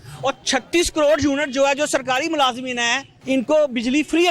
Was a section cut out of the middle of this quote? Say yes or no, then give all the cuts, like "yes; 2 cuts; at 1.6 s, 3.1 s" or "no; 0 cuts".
yes; 1 cut; at 3.1 s